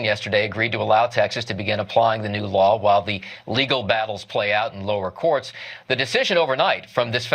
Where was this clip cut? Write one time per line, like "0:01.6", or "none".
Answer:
0:03.6